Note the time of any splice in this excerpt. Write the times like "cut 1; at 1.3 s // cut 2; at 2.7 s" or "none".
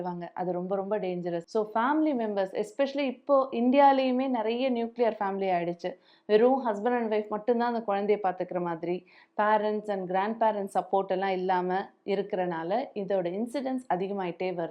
cut 1; at 1.4 s